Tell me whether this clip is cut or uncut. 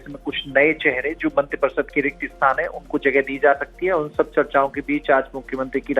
uncut